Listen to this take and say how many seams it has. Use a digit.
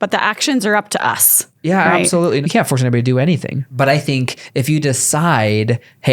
2